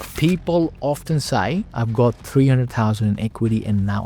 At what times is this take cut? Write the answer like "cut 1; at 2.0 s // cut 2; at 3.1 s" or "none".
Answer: none